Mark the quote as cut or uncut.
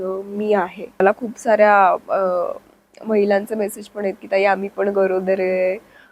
cut